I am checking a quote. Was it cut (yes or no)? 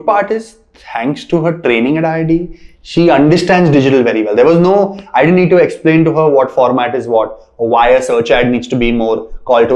no